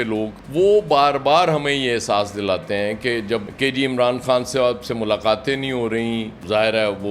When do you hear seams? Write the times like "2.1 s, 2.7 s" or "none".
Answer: 3.5 s